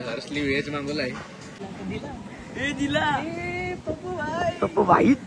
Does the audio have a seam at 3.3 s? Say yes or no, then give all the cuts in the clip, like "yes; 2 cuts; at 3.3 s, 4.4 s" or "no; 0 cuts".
no; 1 cut; at 1.5 s